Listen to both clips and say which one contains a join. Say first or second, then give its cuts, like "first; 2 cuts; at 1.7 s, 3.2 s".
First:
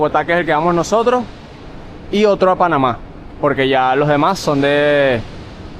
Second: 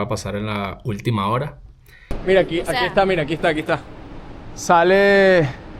second; 1 cut; at 2.1 s